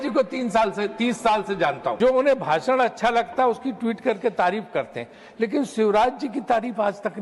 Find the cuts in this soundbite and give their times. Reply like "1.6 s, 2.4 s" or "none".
2.0 s